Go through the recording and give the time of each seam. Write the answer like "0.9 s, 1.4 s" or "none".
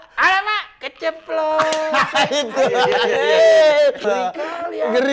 4.0 s